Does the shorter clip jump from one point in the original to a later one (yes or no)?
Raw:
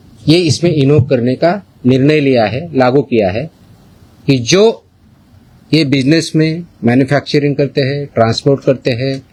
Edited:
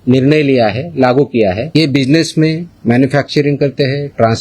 yes